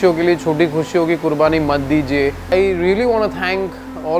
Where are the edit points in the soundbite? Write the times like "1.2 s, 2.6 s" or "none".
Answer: 2.5 s